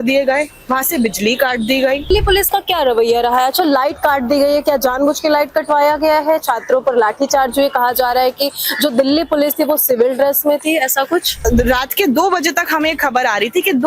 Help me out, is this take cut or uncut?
cut